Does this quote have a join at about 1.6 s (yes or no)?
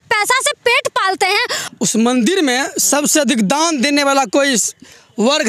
yes